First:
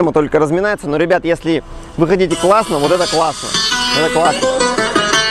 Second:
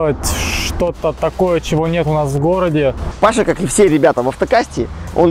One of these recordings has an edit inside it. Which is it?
second; 1 cut; at 3.1 s

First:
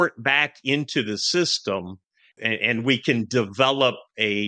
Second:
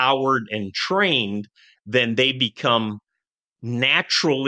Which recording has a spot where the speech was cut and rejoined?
first; 1 cut; at 2.3 s

